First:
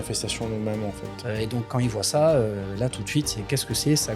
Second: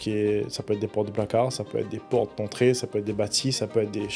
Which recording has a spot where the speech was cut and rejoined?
first; 1 cut; at 1.1 s

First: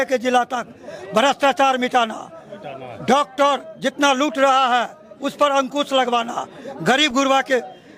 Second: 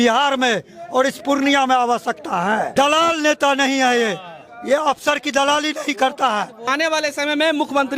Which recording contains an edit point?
second; 2 cuts; at 2.7 s, 6.7 s

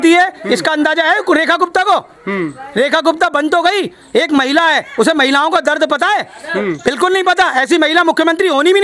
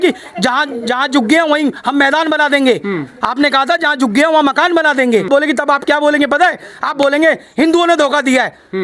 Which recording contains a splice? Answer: second; 1 cut; at 5.3 s

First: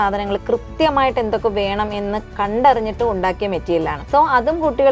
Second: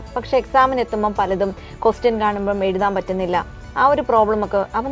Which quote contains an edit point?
first; 2 cuts; at 2.3 s, 4.0 s

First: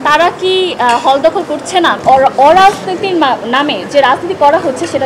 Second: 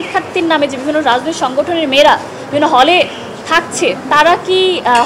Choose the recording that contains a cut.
first; 1 cut; at 2.0 s

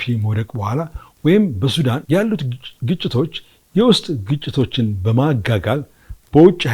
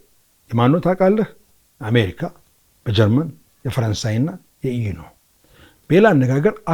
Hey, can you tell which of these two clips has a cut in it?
first; 1 cut; at 2.0 s

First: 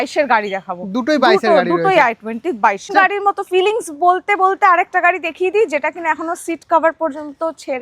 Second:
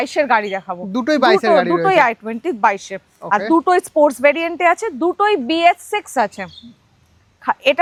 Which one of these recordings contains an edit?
first; 1 cut; at 2.9 s

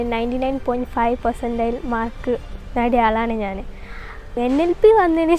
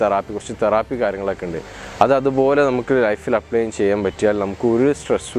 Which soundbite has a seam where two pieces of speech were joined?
first; 1 cut; at 4.3 s

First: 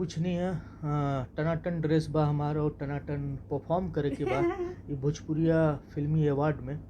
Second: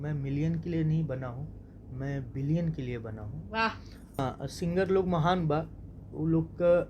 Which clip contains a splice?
second; 1 cut; at 4.2 s

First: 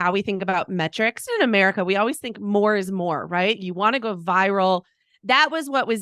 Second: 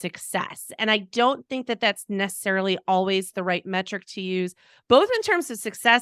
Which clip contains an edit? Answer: first; 2 cuts; at 1.3 s, 3.6 s

